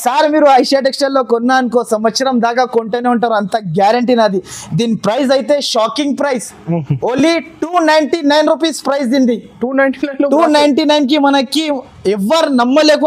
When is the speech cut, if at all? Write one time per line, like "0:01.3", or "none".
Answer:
none